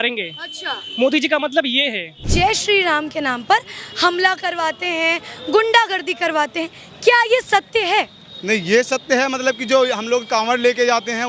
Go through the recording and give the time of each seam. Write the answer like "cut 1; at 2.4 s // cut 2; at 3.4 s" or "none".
cut 1; at 2.3 s